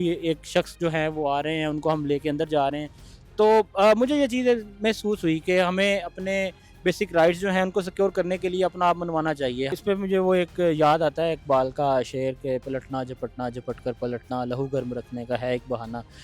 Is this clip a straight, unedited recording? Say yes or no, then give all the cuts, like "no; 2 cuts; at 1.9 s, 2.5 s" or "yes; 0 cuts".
no; 1 cut; at 9.7 s